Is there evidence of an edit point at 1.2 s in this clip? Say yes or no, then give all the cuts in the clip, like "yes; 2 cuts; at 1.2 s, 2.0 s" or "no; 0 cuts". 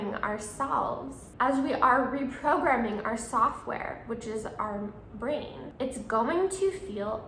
yes; 2 cuts; at 1.2 s, 5.6 s